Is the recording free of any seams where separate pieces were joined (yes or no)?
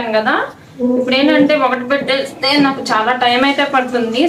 yes